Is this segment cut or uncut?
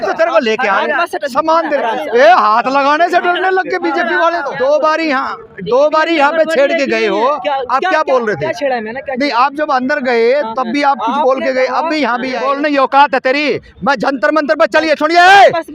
cut